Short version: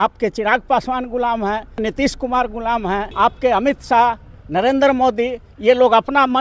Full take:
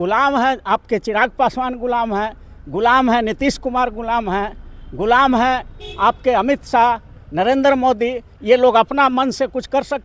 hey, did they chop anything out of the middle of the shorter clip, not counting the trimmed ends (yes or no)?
yes